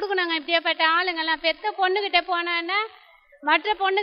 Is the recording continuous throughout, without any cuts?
yes; 0 cuts

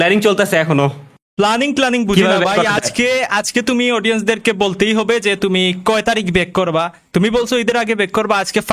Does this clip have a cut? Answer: no; 0 cuts

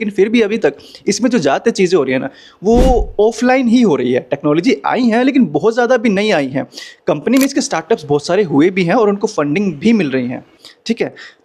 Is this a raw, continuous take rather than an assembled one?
yes; 0 cuts

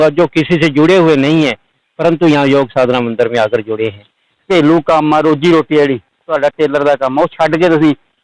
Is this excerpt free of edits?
no; 1 cut; at 4.4 s

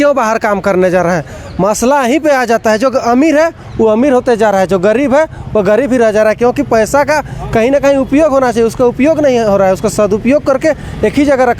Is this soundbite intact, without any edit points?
yes; 0 cuts

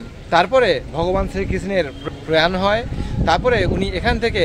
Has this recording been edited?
yes; 1 cut; at 2.0 s

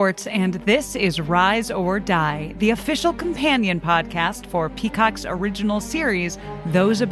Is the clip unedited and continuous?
yes; 0 cuts

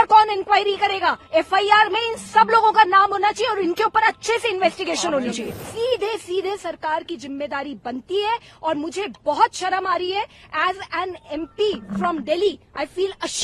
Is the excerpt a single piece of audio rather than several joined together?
no; 1 cut; at 5.5 s

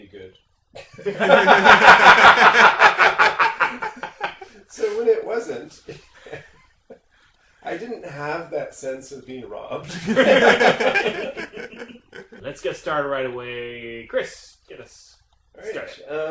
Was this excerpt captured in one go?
no; 1 cut; at 11.9 s

